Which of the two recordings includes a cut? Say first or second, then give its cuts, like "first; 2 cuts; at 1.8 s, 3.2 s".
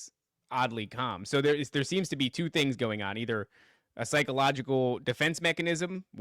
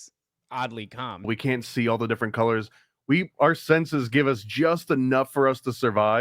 second; 1 cut; at 1.3 s